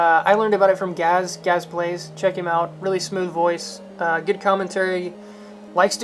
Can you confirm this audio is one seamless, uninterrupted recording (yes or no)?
no